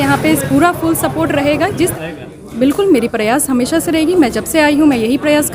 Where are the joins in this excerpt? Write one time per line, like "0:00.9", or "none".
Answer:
0:01.9